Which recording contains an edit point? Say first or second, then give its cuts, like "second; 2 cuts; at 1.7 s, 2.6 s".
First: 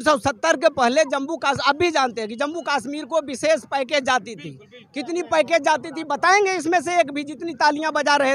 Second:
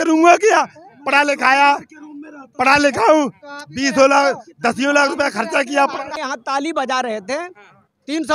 second; 1 cut; at 6.1 s